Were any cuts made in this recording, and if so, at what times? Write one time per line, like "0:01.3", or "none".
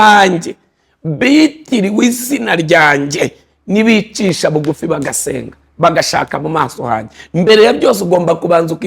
none